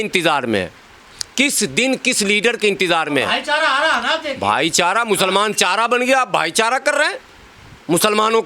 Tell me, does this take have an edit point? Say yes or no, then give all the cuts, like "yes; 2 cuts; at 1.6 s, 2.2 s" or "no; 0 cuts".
no; 0 cuts